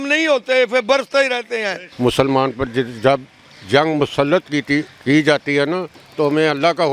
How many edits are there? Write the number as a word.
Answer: zero